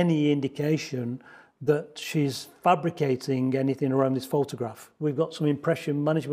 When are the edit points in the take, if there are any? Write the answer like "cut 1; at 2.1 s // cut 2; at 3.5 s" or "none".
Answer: cut 1; at 4.8 s